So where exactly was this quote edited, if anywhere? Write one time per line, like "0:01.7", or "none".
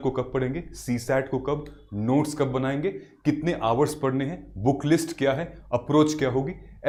none